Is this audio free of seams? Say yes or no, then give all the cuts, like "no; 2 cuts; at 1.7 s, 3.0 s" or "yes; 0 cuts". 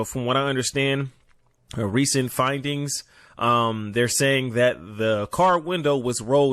yes; 0 cuts